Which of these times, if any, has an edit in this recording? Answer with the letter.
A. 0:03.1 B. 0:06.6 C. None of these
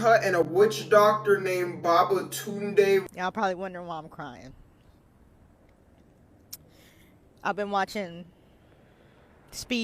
A